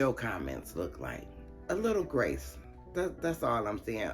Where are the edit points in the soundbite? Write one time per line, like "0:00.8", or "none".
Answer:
0:01.2